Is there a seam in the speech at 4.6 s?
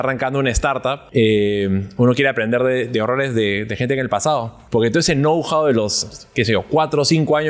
yes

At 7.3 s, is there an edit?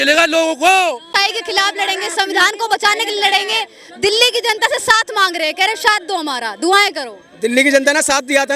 no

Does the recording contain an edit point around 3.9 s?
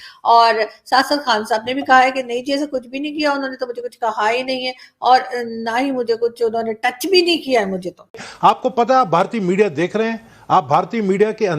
no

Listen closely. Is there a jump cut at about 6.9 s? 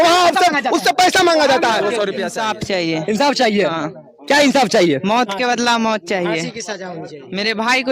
no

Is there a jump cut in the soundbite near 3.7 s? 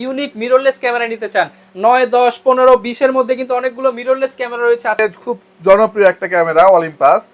no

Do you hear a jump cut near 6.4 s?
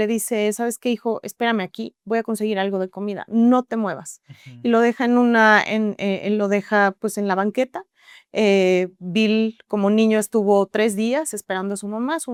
no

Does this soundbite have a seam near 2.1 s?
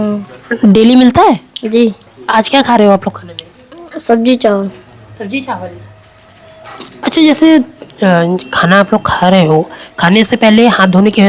no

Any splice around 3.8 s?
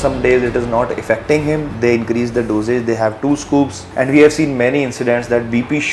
yes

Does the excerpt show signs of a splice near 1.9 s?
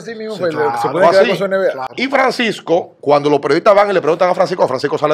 yes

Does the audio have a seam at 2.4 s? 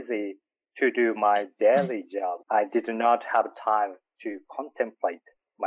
yes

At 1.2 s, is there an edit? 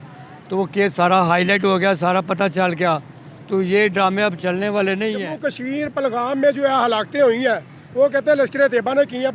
no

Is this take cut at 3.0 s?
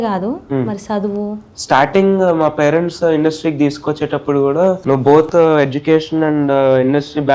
no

